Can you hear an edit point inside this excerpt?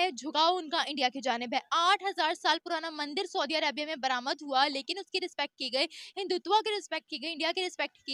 no; 0 cuts

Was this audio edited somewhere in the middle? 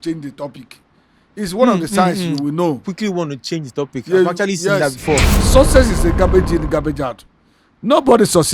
yes; 1 cut; at 5.4 s

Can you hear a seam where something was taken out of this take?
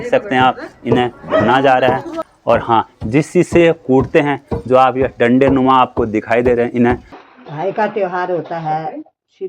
yes; 2 cuts; at 2.3 s, 7.1 s

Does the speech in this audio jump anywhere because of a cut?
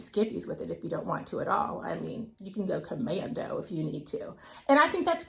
no; 0 cuts

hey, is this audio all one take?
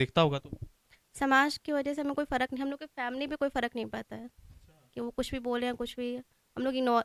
yes; 0 cuts

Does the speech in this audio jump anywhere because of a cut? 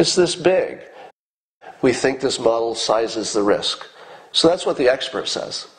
yes; 1 cut; at 1.2 s

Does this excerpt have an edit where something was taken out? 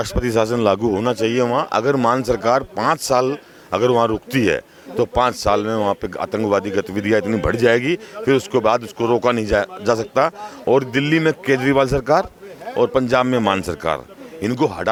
no; 0 cuts

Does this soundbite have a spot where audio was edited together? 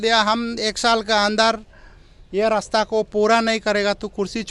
no; 0 cuts

